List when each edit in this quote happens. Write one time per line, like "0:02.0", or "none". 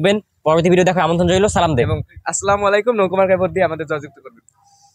none

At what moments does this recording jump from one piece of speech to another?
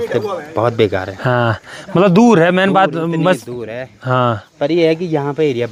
none

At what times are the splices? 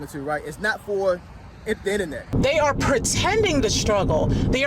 0:02.3

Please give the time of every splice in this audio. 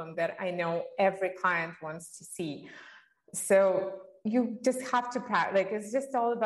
none

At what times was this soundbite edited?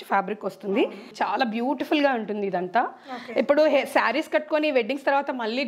0:01.1

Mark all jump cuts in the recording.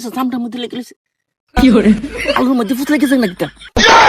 none

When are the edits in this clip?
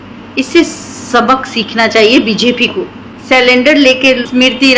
0:03.2

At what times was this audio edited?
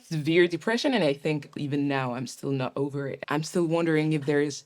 0:01.6
0:03.2

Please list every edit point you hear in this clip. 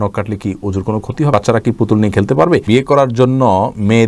0:01.3
0:02.7

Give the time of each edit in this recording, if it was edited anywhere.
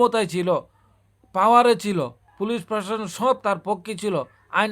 0:02.2

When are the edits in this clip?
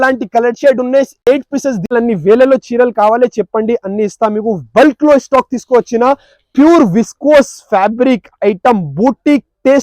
0:01.9

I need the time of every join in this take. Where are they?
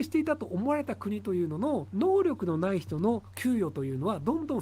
0:01.9

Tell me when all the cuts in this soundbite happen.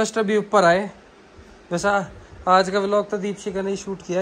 none

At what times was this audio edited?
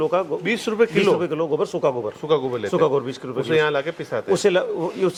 none

